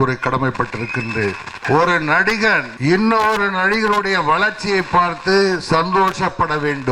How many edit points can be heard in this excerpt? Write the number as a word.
two